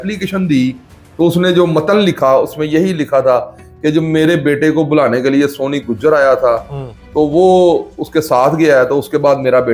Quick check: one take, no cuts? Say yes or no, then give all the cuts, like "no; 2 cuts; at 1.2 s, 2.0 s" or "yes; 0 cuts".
yes; 0 cuts